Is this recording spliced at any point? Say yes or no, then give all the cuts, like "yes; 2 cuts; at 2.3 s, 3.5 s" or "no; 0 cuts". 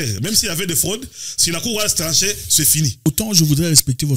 yes; 1 cut; at 3.1 s